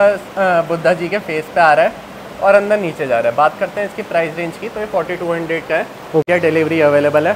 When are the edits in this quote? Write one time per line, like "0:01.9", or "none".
0:06.3